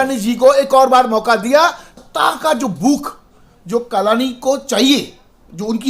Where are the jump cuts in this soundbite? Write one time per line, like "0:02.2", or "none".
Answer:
0:01.9